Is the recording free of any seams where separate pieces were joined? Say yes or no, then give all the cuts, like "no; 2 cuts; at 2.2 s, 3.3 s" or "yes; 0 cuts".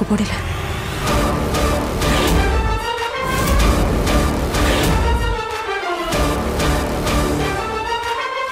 yes; 0 cuts